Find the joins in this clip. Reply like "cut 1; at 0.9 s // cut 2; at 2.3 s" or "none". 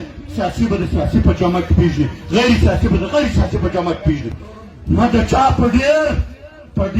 cut 1; at 4.4 s